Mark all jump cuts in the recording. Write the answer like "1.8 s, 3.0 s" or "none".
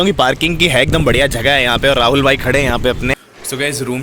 3.1 s